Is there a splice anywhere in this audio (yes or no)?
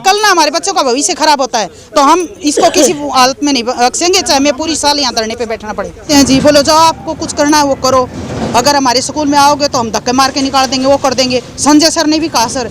yes